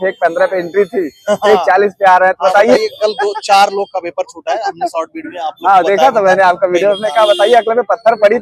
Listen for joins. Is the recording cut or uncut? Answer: uncut